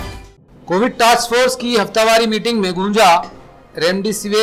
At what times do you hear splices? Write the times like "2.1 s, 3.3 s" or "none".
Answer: none